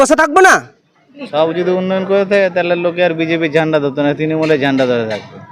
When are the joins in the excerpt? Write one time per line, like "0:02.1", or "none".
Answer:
0:01.2